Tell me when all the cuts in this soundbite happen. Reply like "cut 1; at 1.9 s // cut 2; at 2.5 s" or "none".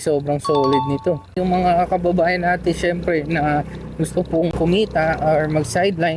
cut 1; at 1.3 s // cut 2; at 4.5 s